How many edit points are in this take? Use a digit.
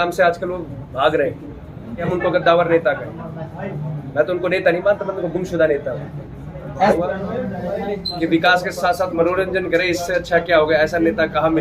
2